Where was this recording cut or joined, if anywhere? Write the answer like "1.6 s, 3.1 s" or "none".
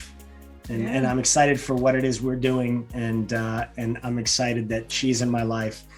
none